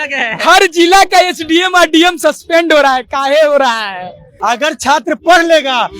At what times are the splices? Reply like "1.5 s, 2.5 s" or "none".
4.3 s